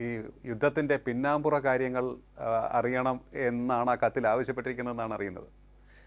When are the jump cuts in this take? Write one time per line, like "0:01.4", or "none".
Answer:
none